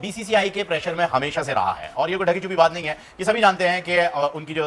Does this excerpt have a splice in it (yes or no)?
no